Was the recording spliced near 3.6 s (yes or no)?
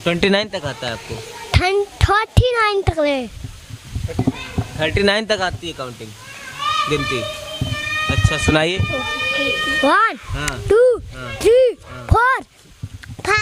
no